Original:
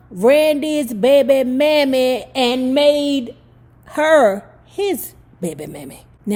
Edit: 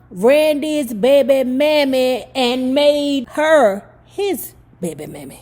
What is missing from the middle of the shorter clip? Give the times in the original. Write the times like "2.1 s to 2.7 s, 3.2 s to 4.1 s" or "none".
3.3 s to 3.9 s